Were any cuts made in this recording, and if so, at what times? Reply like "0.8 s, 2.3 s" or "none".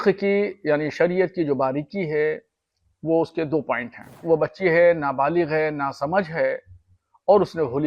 4.2 s